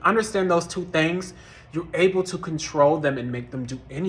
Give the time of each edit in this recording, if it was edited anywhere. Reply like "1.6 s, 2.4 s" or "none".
none